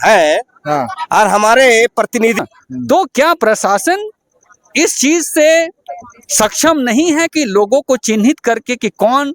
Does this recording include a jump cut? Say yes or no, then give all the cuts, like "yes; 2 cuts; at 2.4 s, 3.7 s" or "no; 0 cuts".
yes; 1 cut; at 2.4 s